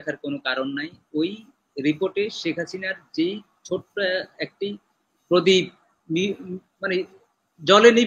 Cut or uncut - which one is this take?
uncut